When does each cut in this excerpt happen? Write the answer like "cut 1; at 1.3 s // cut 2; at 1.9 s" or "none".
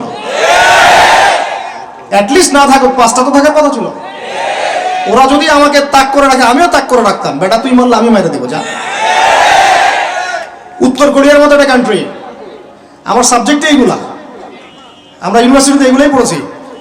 none